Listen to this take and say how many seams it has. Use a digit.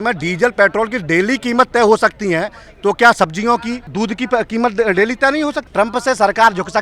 2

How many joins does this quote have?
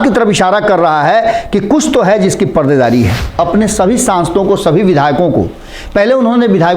1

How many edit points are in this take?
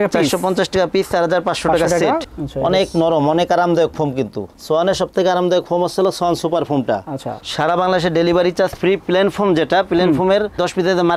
2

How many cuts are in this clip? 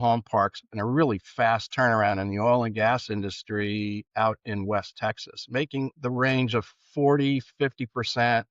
1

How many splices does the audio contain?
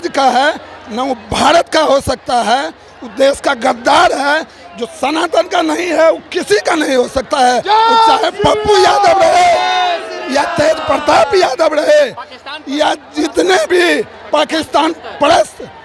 0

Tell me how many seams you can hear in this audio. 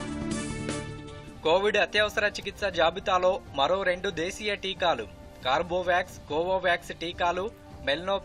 1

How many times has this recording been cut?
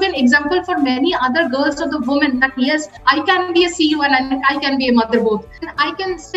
2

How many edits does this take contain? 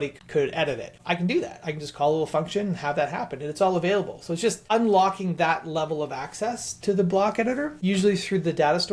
0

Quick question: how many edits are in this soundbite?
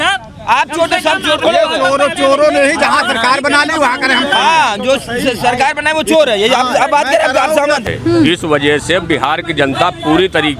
1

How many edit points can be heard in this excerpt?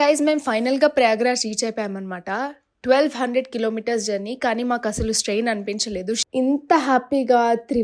1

